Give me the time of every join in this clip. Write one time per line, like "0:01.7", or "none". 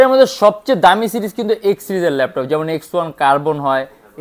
none